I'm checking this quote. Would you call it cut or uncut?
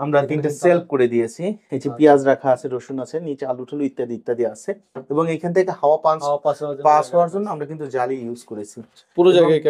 uncut